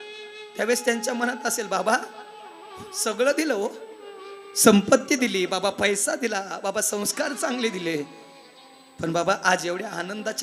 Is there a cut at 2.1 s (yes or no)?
no